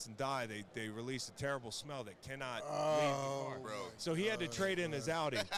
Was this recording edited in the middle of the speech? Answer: no; 0 cuts

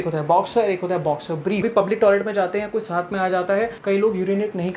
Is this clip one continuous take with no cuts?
no; 2 cuts; at 1.7 s, 3.8 s

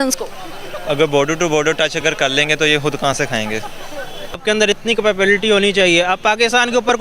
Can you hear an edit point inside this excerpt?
yes; 1 cut; at 4.4 s

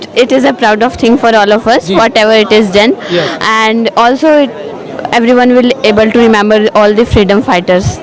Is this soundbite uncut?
yes; 0 cuts

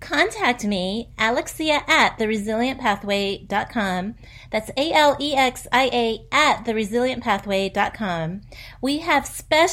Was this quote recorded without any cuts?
yes; 0 cuts

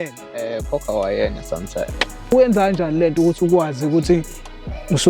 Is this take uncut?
no; 1 cut; at 2.3 s

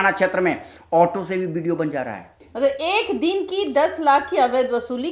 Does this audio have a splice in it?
yes; 1 cut; at 2.4 s

